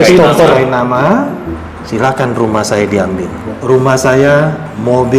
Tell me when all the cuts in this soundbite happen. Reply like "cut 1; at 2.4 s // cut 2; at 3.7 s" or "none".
cut 1; at 1.5 s // cut 2; at 3.5 s